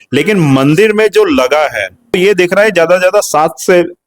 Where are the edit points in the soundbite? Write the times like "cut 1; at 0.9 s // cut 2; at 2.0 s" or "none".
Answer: cut 1; at 2.2 s